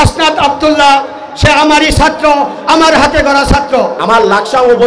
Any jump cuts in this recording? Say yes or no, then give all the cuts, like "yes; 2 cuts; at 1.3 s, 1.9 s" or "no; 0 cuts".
yes; 1 cut; at 4.0 s